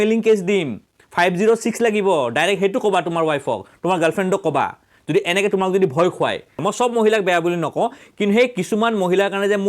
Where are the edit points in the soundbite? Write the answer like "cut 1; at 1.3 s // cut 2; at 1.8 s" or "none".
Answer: cut 1; at 6.5 s